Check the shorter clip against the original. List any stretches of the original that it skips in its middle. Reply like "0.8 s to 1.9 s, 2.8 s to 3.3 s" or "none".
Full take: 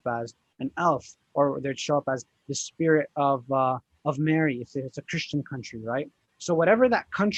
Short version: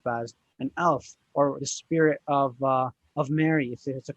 1.7 s to 2.6 s